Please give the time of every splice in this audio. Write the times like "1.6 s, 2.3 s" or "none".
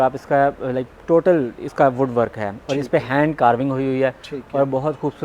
none